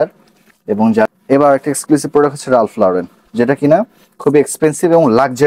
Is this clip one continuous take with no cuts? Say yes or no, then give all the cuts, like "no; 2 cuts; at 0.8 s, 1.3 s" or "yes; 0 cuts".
no; 1 cut; at 1.1 s